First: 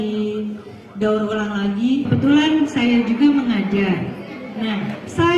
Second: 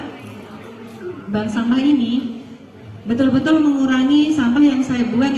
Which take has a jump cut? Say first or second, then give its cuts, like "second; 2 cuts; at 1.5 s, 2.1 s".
first; 1 cut; at 2.1 s